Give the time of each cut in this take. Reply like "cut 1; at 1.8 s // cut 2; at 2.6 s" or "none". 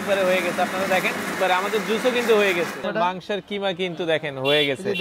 cut 1; at 1.3 s // cut 2; at 2.8 s